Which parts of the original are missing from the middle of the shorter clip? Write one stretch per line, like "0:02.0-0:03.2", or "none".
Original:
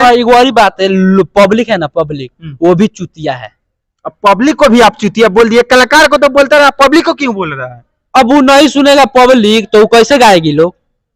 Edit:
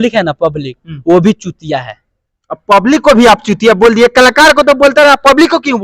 none